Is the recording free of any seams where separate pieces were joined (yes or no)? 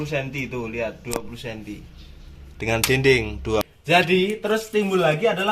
no